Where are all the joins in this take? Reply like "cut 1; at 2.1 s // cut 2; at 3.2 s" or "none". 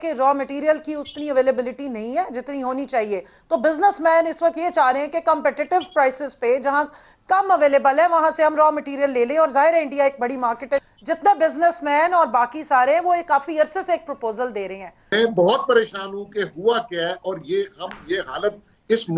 cut 1; at 10.8 s // cut 2; at 15.0 s